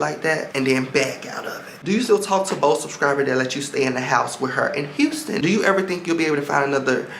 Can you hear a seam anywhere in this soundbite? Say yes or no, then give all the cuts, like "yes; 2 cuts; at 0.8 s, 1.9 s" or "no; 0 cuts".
yes; 2 cuts; at 1.8 s, 5.4 s